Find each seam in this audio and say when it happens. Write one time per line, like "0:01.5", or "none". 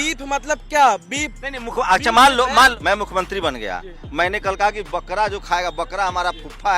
0:02.8